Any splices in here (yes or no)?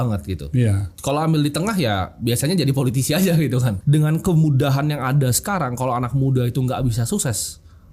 yes